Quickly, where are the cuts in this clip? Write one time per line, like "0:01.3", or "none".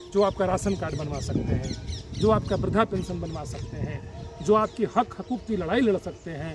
none

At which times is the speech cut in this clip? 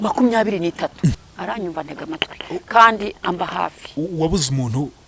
0:01.2

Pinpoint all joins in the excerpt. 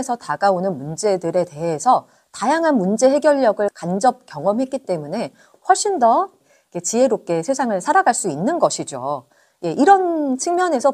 none

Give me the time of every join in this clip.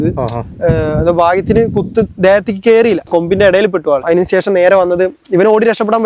0:03.1
0:04.0

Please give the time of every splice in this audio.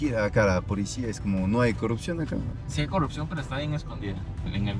none

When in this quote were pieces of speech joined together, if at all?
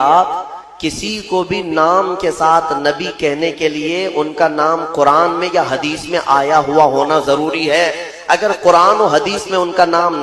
none

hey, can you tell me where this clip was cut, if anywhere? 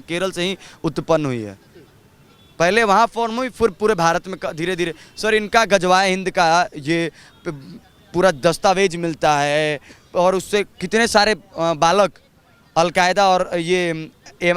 none

